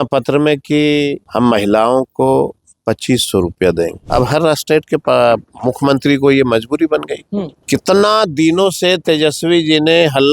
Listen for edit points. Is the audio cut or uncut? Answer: cut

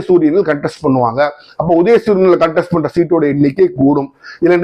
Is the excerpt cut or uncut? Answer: uncut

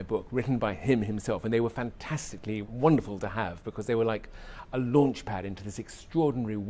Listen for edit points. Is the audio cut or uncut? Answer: uncut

